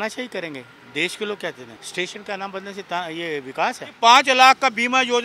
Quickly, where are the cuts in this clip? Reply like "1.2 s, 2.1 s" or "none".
1.7 s, 3.9 s